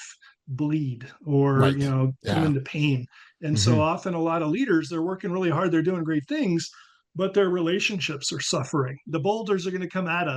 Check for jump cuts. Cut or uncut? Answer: cut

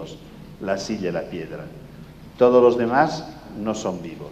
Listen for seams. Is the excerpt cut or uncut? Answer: uncut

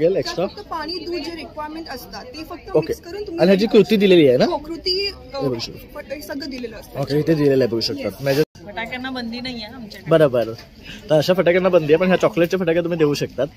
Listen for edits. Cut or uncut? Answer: cut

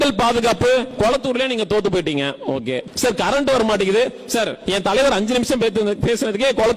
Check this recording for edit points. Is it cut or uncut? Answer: cut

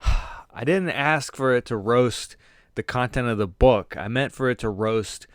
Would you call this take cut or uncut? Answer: uncut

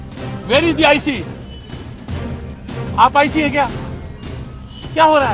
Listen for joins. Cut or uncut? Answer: cut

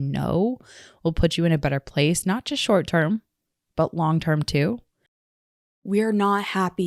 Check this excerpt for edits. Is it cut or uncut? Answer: cut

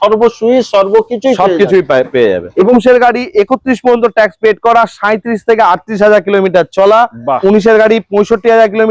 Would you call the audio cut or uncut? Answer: cut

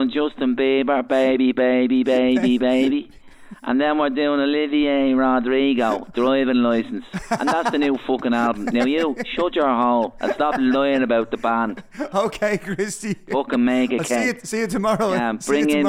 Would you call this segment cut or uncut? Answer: uncut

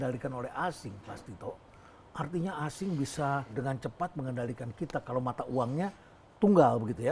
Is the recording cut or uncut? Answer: uncut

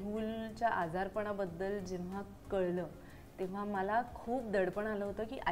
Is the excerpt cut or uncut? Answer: uncut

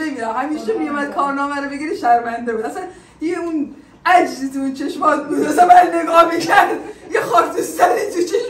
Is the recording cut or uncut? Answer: uncut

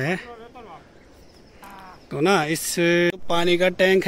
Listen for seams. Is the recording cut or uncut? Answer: cut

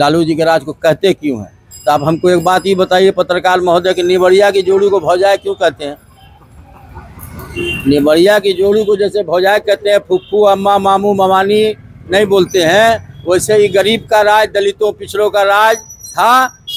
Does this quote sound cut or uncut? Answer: uncut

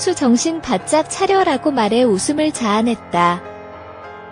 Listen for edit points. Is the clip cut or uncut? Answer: cut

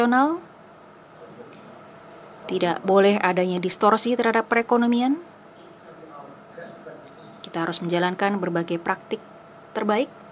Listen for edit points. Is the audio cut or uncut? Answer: cut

